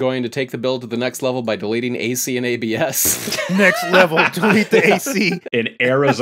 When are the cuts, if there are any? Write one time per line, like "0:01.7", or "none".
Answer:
0:03.5
0:05.4